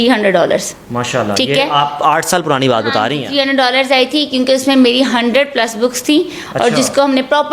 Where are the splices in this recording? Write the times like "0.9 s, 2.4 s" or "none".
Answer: none